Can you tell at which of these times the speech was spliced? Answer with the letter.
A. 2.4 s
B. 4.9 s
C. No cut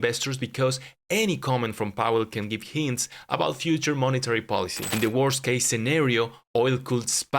B